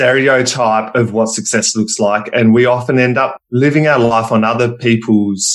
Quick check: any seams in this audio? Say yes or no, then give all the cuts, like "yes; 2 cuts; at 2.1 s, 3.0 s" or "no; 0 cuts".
no; 0 cuts